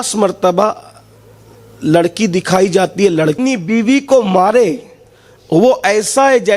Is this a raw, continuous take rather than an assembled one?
no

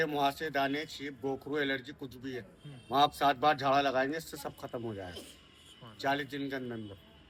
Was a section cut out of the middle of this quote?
no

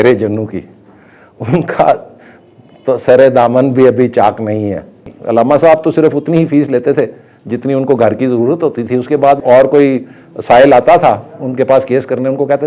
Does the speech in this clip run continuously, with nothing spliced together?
no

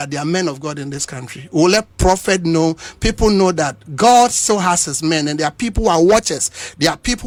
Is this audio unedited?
yes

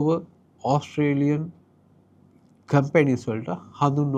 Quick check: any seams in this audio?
no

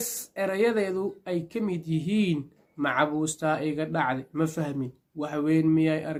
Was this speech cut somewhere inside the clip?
no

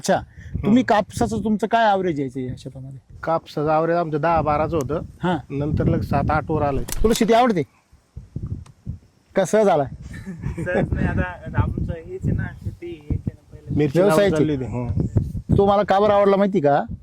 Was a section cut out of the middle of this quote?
yes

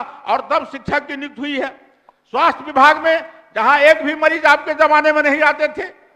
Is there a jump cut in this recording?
no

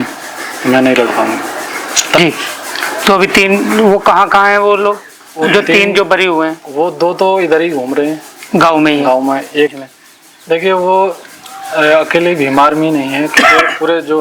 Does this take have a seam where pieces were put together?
yes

